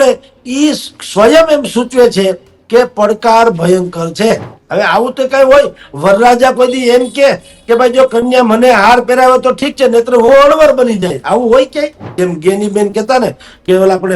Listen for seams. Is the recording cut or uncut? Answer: cut